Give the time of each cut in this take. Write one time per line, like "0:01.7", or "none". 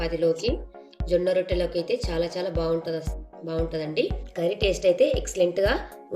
0:04.2

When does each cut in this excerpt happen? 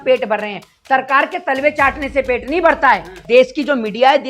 0:03.2

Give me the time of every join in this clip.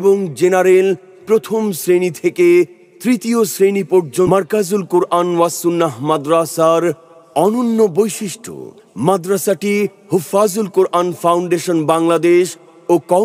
0:04.3

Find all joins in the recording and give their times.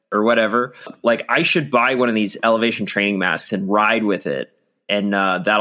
0:00.9

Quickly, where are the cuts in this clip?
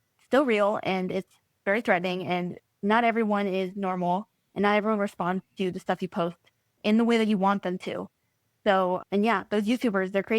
0:06.8

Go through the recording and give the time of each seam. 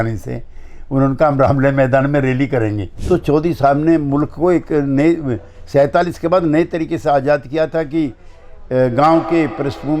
0:02.9

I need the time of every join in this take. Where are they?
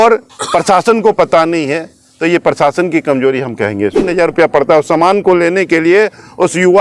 0:04.1

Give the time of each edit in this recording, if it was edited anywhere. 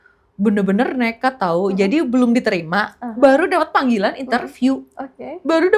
none

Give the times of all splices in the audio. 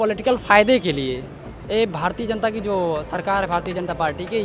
none

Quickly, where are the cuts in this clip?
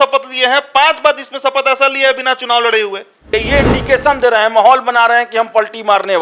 0:03.3

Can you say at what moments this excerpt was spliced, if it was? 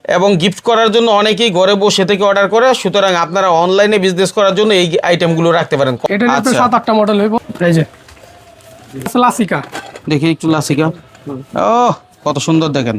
0:06.0
0:07.4
0:09.1

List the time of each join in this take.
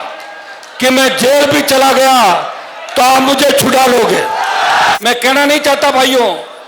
0:05.0

